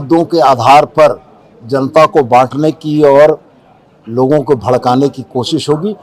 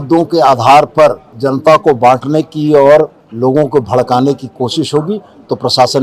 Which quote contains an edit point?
second; 2 cuts; at 1.3 s, 3.2 s

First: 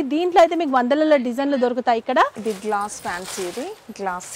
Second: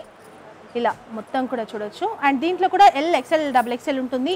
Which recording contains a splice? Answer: first; 1 cut; at 2.4 s

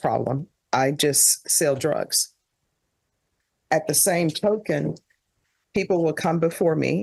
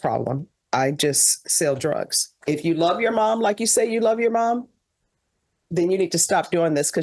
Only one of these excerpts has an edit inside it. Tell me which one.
second; 1 cut; at 2.4 s

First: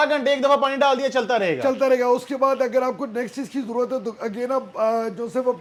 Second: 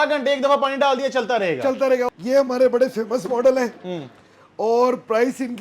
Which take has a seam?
second; 1 cut; at 2.1 s

